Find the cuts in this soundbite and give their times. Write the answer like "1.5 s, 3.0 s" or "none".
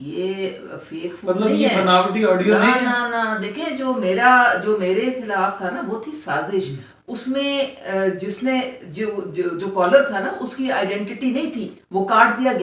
none